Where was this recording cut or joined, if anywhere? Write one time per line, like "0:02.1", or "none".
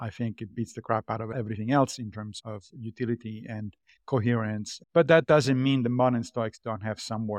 0:01.3
0:04.7